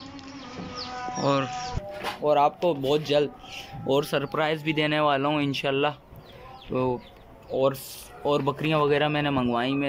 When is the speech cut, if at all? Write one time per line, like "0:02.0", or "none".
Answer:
0:01.7